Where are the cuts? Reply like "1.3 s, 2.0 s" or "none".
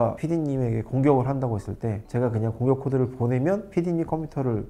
none